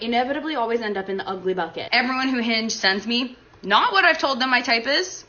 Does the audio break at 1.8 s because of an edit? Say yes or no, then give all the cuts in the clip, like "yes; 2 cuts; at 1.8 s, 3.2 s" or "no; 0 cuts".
no; 0 cuts